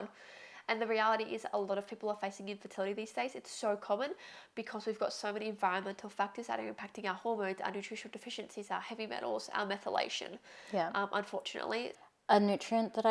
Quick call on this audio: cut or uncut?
cut